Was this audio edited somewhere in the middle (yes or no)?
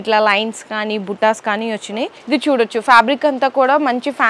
yes